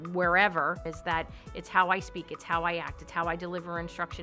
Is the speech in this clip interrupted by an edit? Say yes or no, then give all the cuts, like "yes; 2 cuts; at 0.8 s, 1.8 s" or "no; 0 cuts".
yes; 1 cut; at 1.1 s